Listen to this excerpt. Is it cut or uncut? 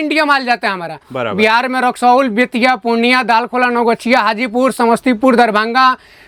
uncut